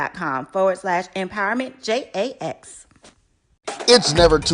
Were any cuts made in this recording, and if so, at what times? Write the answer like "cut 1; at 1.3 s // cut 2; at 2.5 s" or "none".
cut 1; at 3.4 s